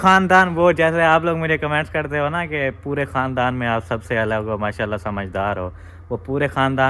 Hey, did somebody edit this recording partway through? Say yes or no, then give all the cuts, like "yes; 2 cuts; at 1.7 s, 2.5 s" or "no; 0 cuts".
no; 0 cuts